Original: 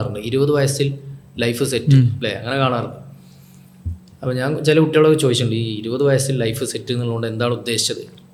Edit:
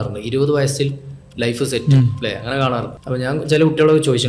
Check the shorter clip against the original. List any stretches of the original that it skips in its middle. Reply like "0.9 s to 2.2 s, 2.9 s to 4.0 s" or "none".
3.0 s to 4.1 s